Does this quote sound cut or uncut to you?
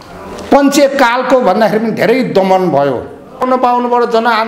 cut